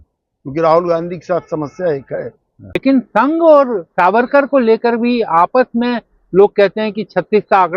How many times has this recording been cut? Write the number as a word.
one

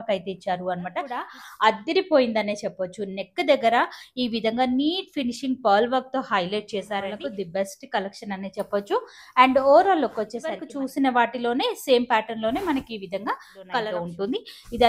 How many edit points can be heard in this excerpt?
four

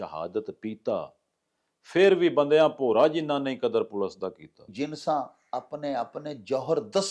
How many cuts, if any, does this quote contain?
one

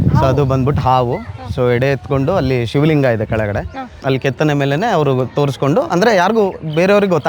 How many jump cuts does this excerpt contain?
one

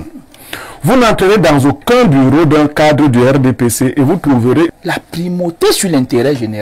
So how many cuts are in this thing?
one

